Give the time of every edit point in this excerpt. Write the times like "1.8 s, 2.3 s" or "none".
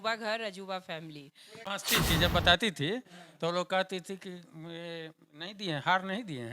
1.6 s